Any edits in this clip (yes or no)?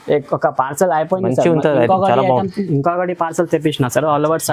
no